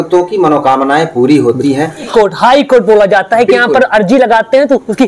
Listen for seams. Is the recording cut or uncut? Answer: cut